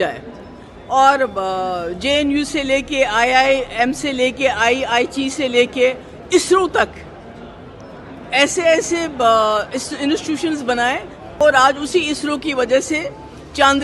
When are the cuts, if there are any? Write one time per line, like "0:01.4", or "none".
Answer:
0:11.4